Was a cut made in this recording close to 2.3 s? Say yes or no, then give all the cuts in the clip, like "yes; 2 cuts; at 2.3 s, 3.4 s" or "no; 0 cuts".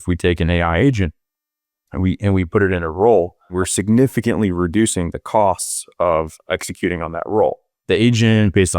no; 1 cut; at 3.5 s